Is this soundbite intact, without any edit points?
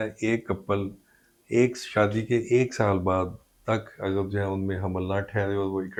yes; 0 cuts

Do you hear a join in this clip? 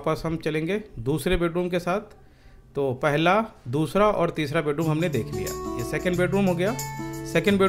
no; 0 cuts

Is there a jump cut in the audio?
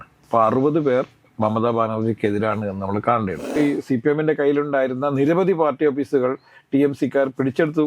yes; 1 cut; at 3.4 s

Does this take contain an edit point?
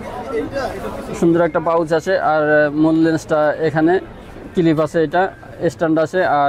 no; 0 cuts

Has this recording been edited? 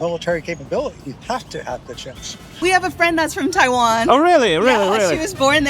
yes; 1 cut; at 2.6 s

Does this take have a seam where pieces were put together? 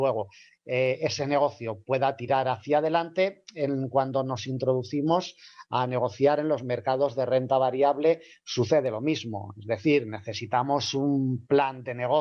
yes; 1 cut; at 3.1 s

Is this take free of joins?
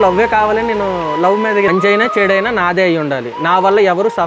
no; 1 cut; at 1.7 s

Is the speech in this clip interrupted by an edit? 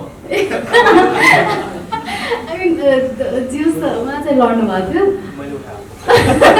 no; 0 cuts

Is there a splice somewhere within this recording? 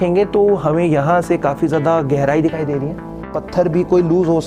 yes; 1 cut; at 3.4 s

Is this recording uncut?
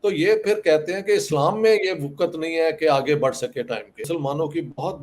no; 1 cut; at 4.0 s

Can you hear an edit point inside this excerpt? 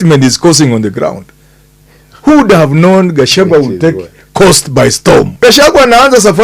yes; 1 cut; at 5.3 s

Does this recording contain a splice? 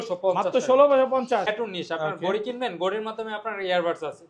yes; 1 cut; at 1.5 s

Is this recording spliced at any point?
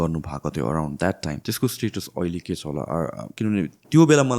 yes; 2 cuts; at 1.4 s, 3.3 s

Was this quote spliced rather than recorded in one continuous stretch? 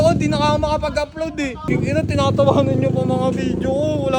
yes; 1 cut; at 1.7 s

